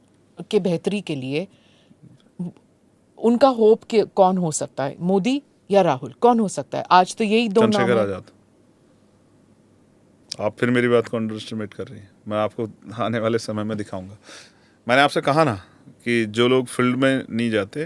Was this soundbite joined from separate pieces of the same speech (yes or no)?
no